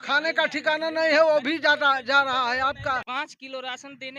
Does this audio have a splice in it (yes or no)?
yes